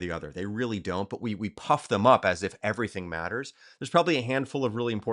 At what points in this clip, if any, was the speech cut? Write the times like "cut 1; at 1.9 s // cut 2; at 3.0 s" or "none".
none